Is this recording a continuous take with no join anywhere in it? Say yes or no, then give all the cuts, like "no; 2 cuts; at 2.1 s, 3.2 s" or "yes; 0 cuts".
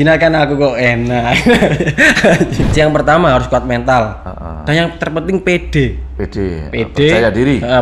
no; 1 cut; at 2.6 s